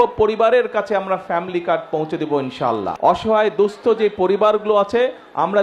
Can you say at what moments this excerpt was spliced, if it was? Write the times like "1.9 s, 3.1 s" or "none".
2.9 s